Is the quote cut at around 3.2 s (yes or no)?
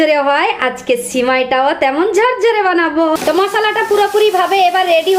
yes